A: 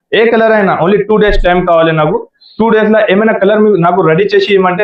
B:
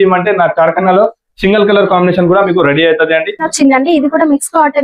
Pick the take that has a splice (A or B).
B